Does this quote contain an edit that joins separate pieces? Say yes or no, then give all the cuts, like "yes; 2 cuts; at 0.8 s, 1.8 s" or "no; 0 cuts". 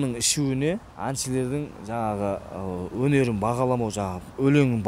yes; 1 cut; at 0.9 s